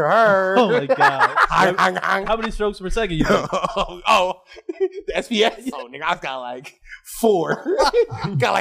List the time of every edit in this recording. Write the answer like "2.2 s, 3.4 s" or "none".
2.1 s, 5.7 s